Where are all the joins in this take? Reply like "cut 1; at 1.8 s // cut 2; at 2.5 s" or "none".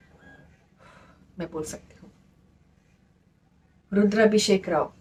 none